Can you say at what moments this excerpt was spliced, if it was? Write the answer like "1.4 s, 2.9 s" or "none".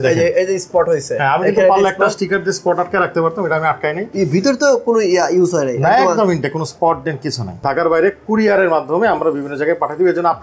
4.1 s, 7.6 s